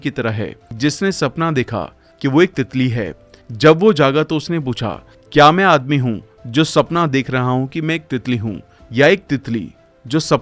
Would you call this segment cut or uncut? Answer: uncut